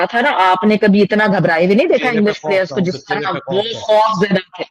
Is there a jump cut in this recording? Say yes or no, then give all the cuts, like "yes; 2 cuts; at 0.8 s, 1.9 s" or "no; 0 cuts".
no; 0 cuts